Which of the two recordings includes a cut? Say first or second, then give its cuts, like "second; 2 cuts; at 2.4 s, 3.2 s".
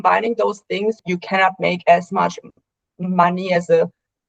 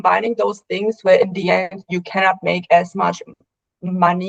first; 1 cut; at 1.0 s